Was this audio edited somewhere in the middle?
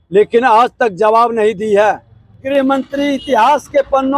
yes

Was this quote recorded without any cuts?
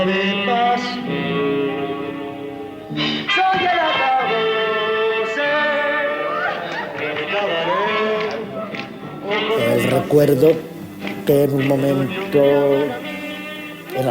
no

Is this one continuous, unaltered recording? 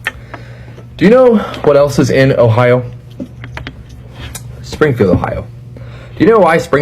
no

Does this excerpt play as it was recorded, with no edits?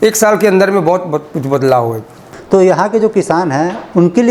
no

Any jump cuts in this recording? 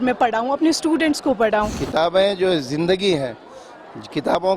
yes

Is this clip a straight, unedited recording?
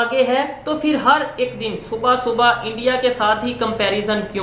yes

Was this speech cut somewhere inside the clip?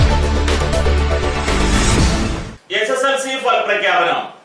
yes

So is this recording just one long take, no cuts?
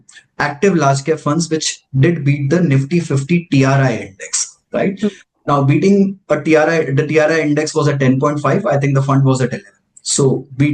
yes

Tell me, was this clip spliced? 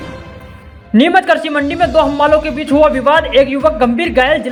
no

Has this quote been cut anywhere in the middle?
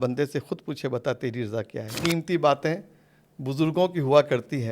yes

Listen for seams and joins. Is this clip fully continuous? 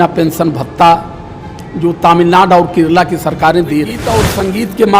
no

